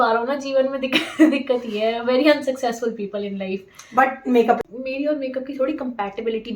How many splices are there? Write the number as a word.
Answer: one